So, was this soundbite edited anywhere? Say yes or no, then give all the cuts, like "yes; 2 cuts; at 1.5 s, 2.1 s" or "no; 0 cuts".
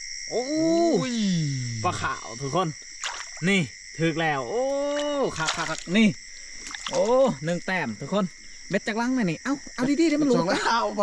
no; 0 cuts